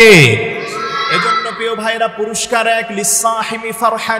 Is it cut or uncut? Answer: uncut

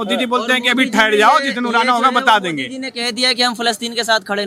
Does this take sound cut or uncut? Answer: uncut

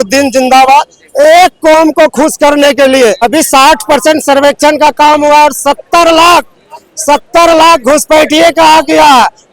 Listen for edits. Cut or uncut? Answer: cut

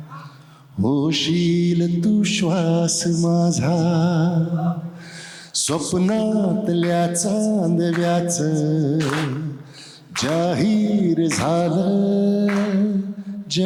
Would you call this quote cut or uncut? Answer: uncut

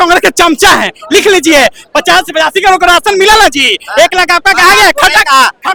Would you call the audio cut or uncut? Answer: uncut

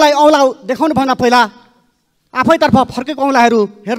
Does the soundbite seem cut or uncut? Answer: uncut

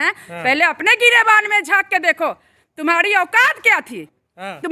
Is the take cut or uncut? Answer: uncut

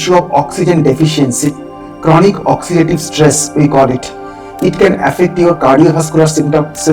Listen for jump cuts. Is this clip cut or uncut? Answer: uncut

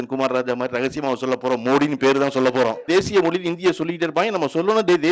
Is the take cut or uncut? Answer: cut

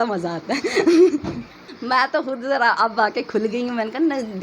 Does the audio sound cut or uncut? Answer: cut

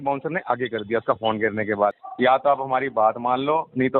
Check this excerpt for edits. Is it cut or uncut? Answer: cut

